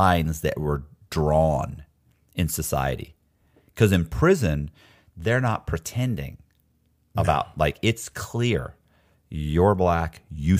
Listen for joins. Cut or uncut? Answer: uncut